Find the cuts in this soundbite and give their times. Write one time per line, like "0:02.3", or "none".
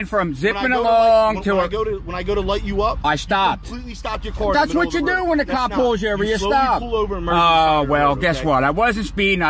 none